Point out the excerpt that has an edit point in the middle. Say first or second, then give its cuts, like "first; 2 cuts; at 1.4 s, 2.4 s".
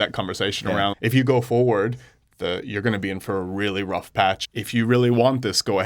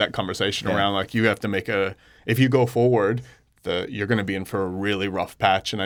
first; 2 cuts; at 0.9 s, 4.4 s